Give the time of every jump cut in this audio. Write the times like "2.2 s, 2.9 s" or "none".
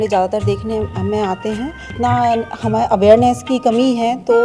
1.8 s